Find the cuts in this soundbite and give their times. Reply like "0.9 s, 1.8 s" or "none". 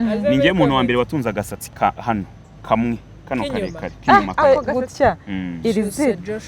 4.4 s